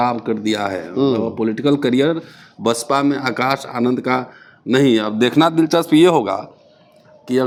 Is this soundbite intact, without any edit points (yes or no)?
yes